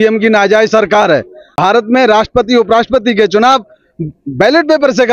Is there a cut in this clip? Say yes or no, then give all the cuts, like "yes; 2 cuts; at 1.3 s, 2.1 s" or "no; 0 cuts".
yes; 1 cut; at 1.4 s